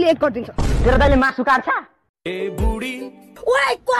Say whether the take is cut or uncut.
cut